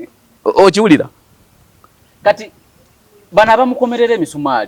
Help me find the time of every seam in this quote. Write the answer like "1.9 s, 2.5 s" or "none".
none